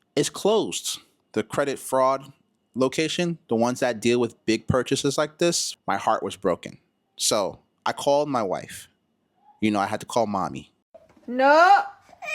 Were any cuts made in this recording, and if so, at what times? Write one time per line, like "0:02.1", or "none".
0:05.7